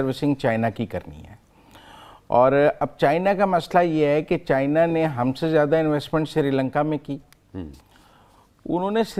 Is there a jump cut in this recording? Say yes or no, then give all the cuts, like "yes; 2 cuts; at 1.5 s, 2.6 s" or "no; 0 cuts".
no; 0 cuts